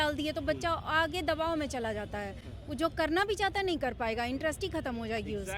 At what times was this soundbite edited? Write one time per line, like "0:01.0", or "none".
none